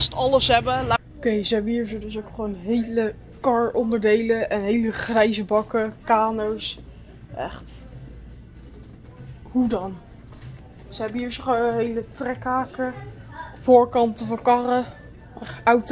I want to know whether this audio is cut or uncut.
cut